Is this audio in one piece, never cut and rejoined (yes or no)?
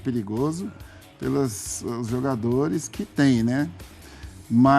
yes